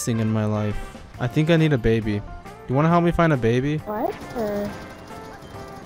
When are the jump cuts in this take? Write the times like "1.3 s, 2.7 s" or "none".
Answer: 4.5 s